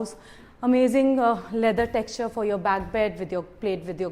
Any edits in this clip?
no; 0 cuts

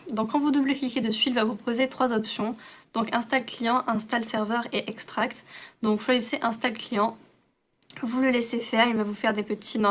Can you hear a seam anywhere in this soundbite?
no; 0 cuts

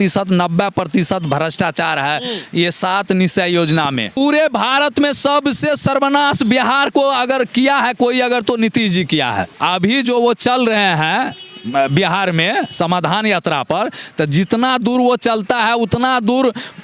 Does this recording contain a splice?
yes; 2 cuts; at 4.2 s, 9.5 s

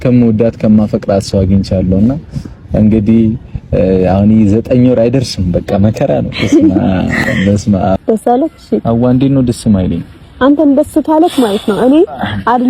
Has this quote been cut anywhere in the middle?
yes; 1 cut; at 8.0 s

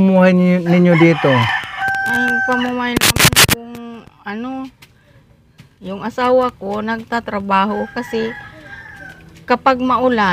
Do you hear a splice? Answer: no; 0 cuts

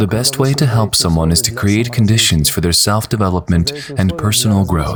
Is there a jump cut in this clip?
no; 0 cuts

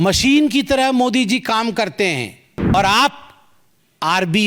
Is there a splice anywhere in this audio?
yes; 1 cut; at 2.7 s

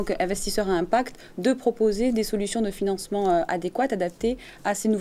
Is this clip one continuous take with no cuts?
yes; 0 cuts

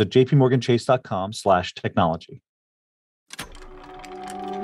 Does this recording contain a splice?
yes; 1 cut; at 3.2 s

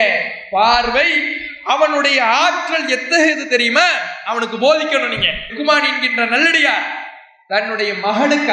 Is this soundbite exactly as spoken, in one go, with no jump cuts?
yes; 0 cuts

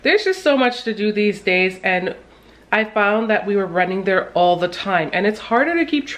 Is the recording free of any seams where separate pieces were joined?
yes; 0 cuts

